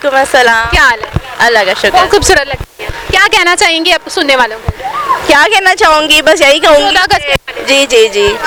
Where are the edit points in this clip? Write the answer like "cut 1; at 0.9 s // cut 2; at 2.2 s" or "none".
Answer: none